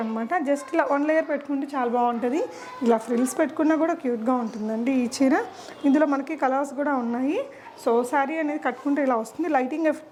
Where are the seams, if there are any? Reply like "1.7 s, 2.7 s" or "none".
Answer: none